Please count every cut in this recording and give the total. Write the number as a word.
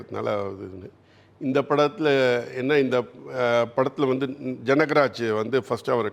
zero